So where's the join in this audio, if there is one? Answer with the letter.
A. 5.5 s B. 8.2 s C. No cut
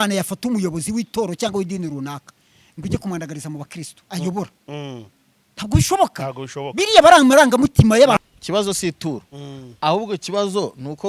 B